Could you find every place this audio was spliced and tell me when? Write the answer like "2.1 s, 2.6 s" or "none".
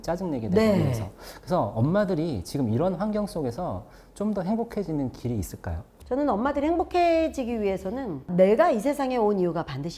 5.9 s